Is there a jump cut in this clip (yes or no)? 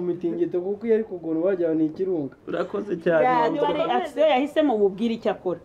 yes